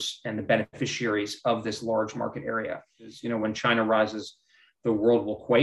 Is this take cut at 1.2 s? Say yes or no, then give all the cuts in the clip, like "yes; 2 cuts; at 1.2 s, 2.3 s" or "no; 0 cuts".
no; 1 cut; at 3.2 s